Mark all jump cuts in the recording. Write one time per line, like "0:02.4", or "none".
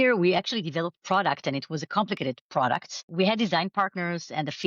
0:01.0
0:03.0